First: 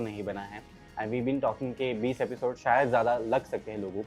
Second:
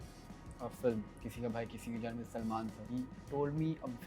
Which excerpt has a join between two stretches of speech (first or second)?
second